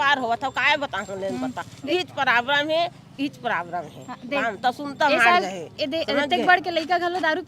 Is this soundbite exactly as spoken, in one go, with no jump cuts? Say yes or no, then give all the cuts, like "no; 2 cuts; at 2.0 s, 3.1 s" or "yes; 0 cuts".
yes; 0 cuts